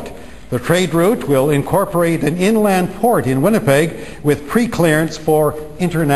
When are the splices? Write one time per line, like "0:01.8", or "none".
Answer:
none